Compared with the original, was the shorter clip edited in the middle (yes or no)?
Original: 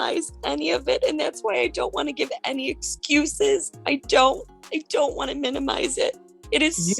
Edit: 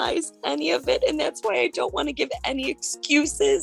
no